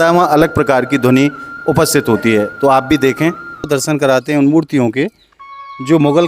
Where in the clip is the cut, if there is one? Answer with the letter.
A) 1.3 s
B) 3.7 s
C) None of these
B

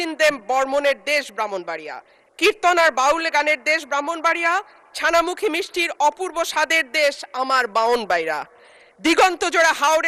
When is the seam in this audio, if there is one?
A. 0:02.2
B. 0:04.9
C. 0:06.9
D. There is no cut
D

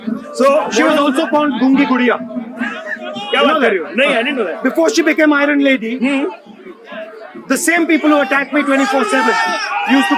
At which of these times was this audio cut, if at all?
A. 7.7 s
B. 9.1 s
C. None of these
C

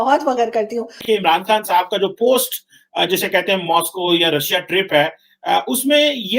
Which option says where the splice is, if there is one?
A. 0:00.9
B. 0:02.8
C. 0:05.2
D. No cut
A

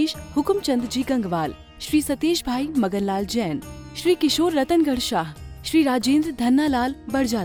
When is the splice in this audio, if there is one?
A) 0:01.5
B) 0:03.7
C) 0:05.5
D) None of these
D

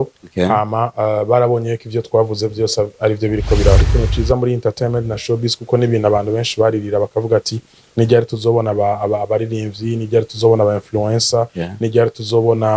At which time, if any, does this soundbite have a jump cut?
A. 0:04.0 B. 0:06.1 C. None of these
A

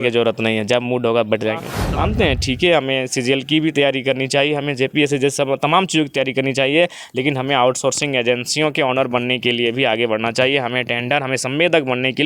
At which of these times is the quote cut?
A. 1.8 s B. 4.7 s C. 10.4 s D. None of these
A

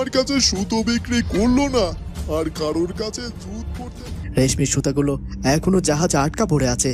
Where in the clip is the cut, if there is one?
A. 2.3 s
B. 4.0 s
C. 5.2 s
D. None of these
B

